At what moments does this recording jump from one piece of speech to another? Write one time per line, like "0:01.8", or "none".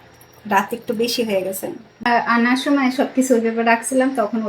0:02.0